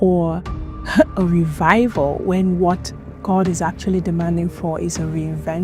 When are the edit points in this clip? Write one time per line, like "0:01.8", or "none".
none